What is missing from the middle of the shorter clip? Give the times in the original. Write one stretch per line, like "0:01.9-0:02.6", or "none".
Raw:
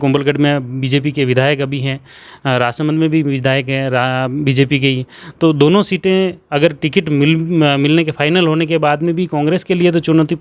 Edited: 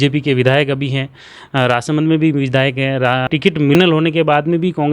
0:04.4-0:08.1